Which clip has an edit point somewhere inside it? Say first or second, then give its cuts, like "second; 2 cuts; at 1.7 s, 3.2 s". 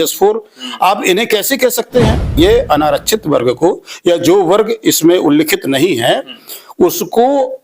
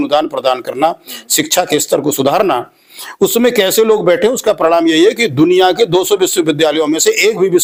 first; 1 cut; at 2.3 s